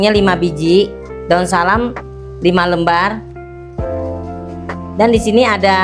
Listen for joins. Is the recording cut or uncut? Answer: cut